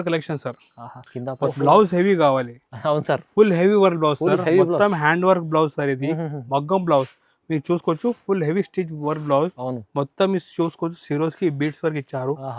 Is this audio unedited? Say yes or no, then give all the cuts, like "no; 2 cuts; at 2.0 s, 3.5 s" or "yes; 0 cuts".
no; 1 cut; at 1.5 s